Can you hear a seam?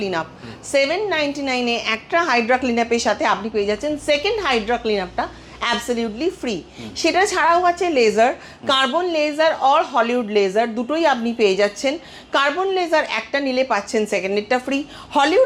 no; 0 cuts

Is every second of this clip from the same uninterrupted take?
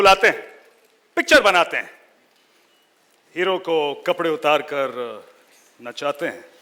yes; 0 cuts

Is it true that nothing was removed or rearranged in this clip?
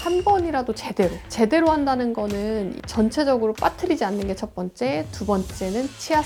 yes; 0 cuts

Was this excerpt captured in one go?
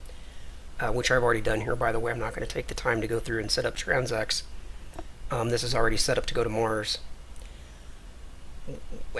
yes; 0 cuts

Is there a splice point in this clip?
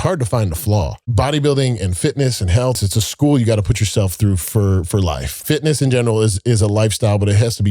yes; 3 cuts; at 1.0 s, 2.8 s, 5.4 s

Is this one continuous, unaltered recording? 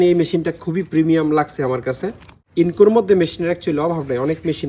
no; 1 cut; at 2.4 s

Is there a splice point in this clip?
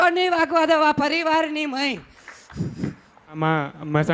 no; 0 cuts

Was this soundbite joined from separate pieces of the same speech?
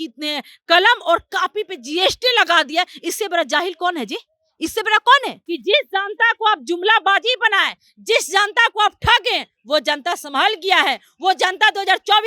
yes; 1 cut; at 5.4 s

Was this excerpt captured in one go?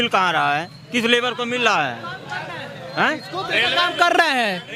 yes; 0 cuts

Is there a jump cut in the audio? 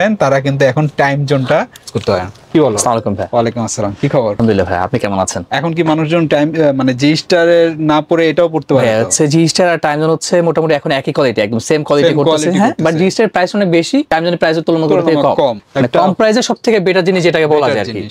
no; 0 cuts

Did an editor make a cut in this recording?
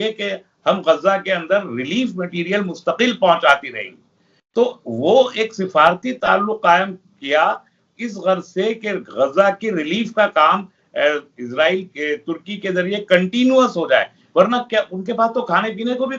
no; 0 cuts

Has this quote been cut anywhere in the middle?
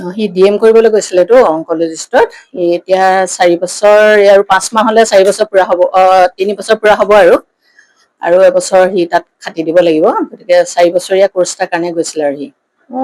no; 0 cuts

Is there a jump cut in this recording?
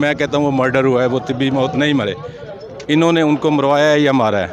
no; 0 cuts

